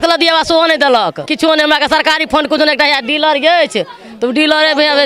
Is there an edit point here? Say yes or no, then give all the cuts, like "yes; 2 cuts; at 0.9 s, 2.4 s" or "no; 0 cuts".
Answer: yes; 1 cut; at 1.3 s